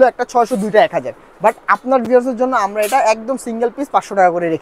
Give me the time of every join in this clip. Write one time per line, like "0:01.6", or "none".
none